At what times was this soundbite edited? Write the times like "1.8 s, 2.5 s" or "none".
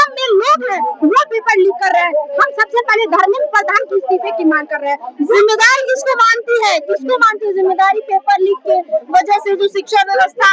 none